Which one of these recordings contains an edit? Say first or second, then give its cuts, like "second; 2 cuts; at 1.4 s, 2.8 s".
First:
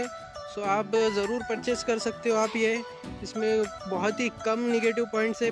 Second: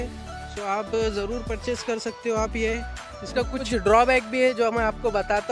second; 1 cut; at 3.3 s